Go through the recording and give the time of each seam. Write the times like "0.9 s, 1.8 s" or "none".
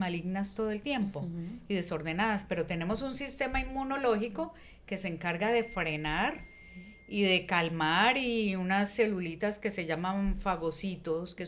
none